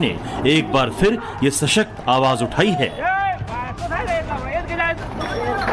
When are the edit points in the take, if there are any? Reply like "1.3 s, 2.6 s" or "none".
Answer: none